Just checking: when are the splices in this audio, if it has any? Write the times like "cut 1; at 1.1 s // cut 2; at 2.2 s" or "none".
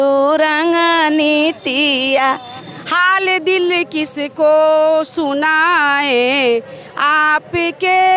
cut 1; at 2.6 s